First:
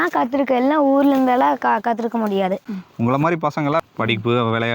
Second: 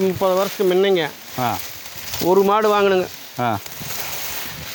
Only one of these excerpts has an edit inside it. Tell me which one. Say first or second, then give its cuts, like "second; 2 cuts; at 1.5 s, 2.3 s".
first; 2 cuts; at 2.7 s, 3.8 s